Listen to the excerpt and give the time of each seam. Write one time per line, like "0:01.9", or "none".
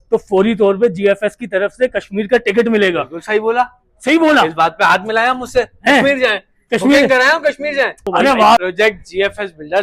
0:08.6

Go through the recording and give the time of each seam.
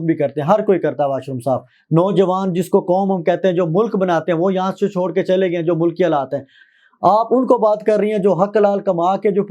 0:01.7
0:06.6

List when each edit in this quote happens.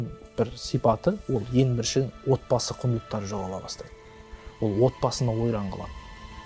none

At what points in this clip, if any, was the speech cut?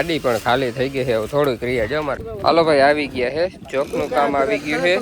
0:02.3

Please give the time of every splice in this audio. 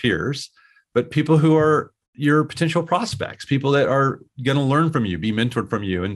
none

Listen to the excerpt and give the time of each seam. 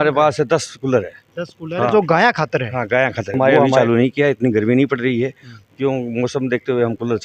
0:03.6

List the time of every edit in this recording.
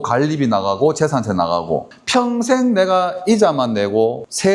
0:01.9

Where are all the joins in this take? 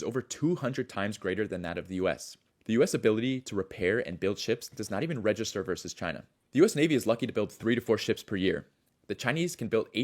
none

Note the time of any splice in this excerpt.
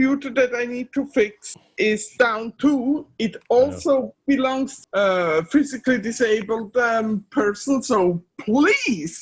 0:04.7

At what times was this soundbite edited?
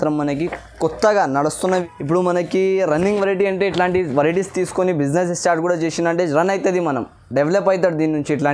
0:01.9

